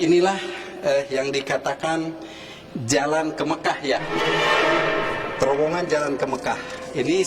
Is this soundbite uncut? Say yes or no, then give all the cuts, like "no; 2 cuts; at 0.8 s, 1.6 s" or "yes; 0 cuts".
yes; 0 cuts